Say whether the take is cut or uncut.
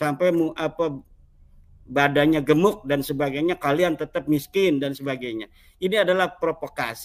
uncut